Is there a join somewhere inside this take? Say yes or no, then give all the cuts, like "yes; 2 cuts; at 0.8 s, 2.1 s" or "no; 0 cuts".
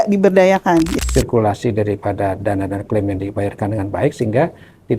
yes; 1 cut; at 0.9 s